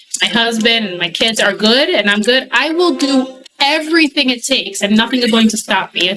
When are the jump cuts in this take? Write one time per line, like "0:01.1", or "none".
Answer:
none

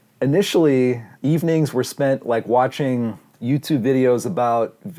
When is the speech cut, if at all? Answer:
0:01.1
0:03.3

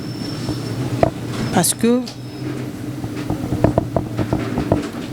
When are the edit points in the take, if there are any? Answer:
none

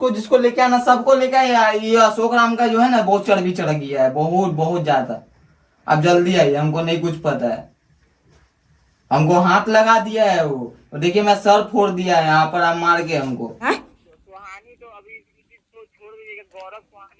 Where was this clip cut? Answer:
0:13.7

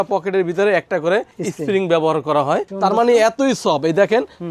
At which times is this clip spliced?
0:02.7

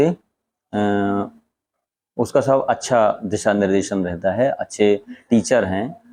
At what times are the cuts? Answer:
none

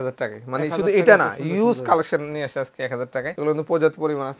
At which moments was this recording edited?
0:03.4

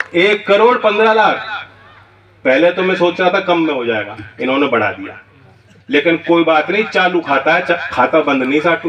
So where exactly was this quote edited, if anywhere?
none

